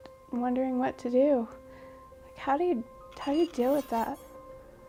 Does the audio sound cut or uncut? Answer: uncut